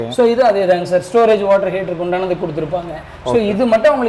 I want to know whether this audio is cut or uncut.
uncut